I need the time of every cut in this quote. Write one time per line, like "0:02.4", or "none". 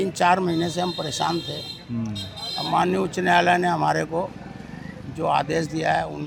none

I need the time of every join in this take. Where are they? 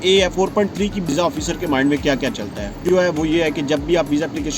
0:01.1
0:02.8

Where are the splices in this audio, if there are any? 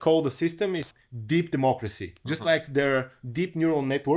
none

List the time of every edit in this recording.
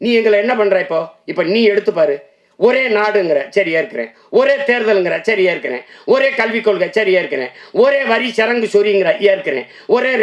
none

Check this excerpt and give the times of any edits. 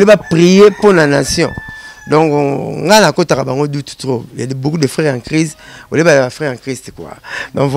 none

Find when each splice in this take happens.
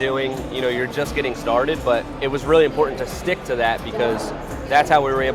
0:02.1

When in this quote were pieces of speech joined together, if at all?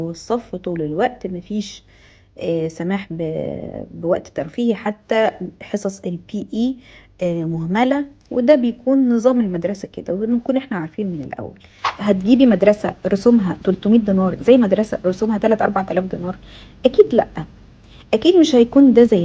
0:11.9

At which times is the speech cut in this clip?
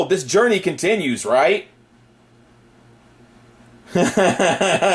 0:01.3

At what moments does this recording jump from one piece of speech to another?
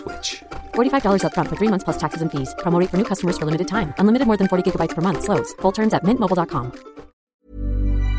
0:07.2

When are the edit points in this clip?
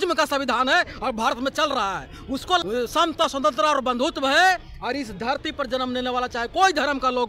0:02.6

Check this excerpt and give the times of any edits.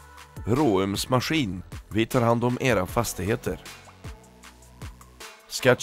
none

